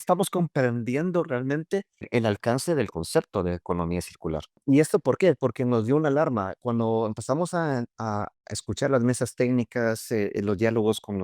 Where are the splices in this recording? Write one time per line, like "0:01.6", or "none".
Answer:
0:04.6